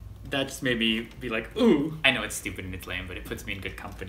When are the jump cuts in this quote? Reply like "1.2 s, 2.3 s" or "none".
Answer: 2.0 s